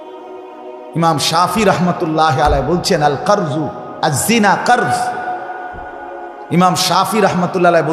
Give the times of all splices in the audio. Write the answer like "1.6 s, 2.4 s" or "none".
0.9 s